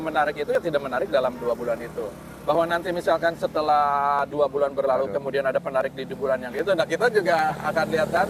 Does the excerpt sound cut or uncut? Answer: uncut